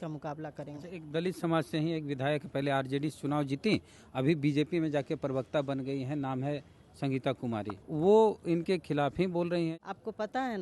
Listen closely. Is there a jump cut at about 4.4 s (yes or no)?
no